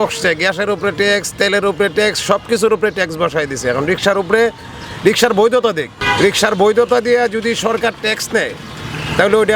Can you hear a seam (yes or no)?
no